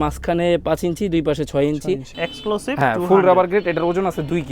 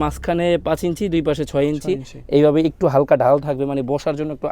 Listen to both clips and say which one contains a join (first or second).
first